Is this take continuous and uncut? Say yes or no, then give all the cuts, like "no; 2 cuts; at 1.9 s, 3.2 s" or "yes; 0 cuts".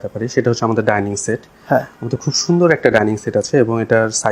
yes; 0 cuts